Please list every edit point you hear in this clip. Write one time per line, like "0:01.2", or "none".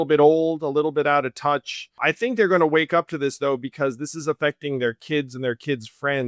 0:02.0